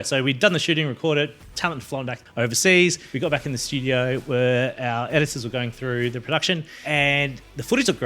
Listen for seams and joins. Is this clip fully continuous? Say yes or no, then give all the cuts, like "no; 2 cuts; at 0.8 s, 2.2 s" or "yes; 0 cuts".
no; 3 cuts; at 2.2 s, 3.0 s, 6.7 s